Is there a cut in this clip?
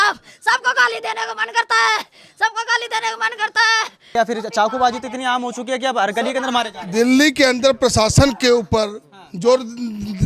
yes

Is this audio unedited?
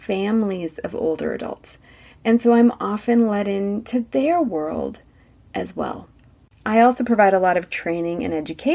yes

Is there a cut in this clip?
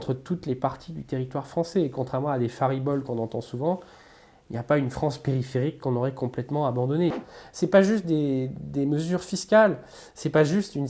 yes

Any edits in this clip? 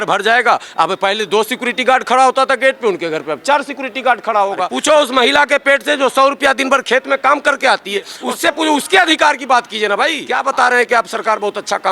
yes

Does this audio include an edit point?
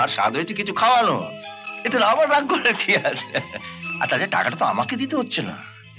no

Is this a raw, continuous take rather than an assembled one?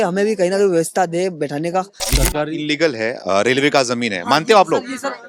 no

